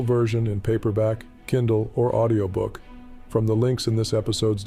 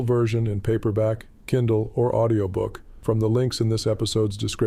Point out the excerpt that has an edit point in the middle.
second; 1 cut; at 2.8 s

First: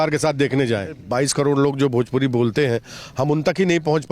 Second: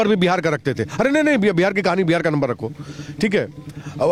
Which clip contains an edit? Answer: first; 1 cut; at 1.0 s

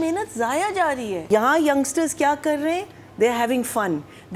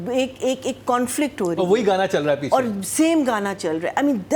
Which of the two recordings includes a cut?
first; 1 cut; at 1.2 s

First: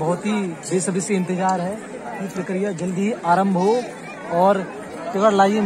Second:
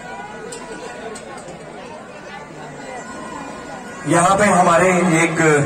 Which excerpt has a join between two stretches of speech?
second; 1 cut; at 3.0 s

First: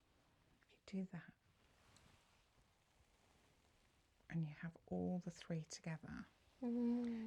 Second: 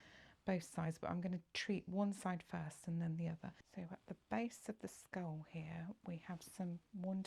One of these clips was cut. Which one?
second; 1 cut; at 3.6 s

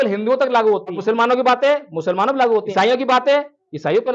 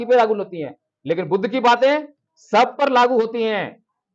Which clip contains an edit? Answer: first; 2 cuts; at 1.0 s, 2.7 s

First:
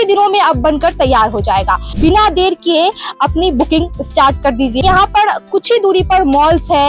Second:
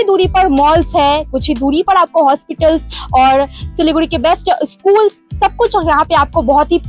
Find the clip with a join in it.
first; 2 cuts; at 1.9 s, 4.8 s

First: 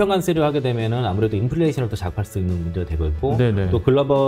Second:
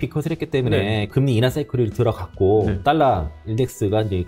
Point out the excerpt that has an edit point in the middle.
second; 2 cuts; at 1.1 s, 2.8 s

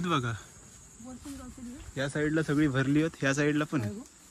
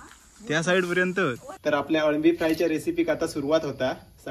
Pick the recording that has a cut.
second; 1 cut; at 1.5 s

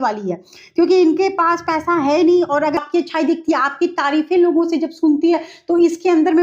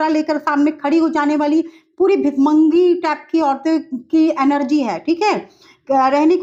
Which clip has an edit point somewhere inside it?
first; 1 cut; at 2.8 s

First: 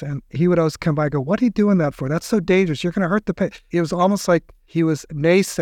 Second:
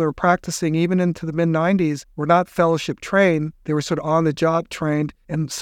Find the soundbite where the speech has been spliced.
second; 2 cuts; at 2.1 s, 3.5 s

